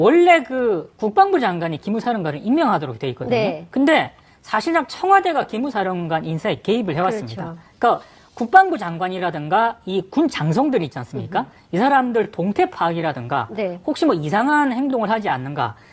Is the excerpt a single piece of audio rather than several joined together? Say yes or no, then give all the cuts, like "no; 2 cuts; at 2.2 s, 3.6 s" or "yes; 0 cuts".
no; 1 cut; at 9.3 s